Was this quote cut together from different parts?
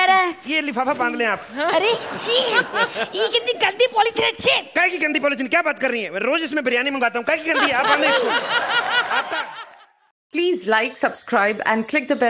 yes; 1 cut; at 9.6 s

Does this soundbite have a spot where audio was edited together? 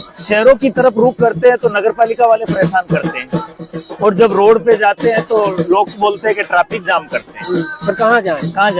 no; 0 cuts

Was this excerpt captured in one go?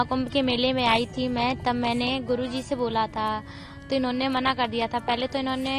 yes; 0 cuts

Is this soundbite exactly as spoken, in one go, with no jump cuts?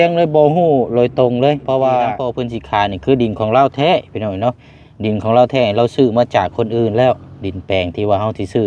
no; 1 cut; at 2.4 s

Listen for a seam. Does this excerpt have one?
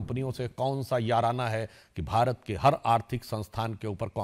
no; 0 cuts

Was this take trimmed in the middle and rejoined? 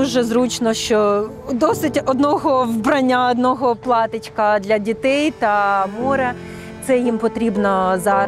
no; 0 cuts

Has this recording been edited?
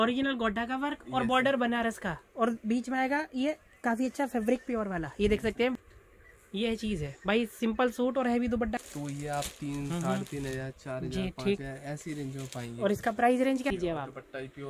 yes; 3 cuts; at 5.7 s, 8.8 s, 13.7 s

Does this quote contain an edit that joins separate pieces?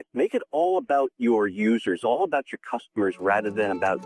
no; 0 cuts

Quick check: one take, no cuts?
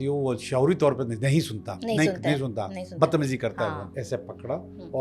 no; 1 cut; at 3.9 s

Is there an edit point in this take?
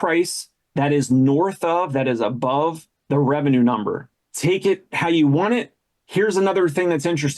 yes; 1 cut; at 4.3 s

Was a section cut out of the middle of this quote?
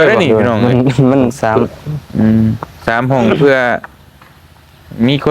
yes; 1 cut; at 1.4 s

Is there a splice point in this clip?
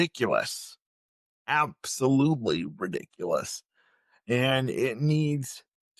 no; 0 cuts

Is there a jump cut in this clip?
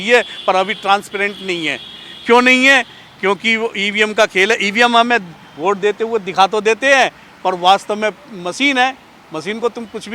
no; 0 cuts

